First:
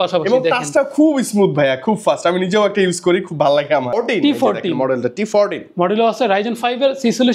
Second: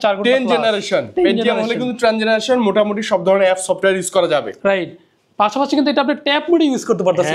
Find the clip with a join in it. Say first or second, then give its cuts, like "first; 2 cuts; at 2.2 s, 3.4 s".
first; 1 cut; at 3.9 s